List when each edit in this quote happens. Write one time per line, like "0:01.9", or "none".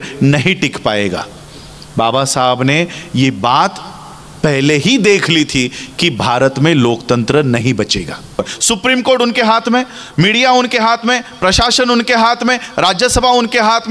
0:08.5